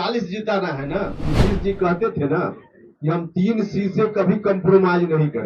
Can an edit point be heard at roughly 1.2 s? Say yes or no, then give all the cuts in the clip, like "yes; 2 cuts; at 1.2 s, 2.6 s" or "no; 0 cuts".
yes; 1 cut; at 1.2 s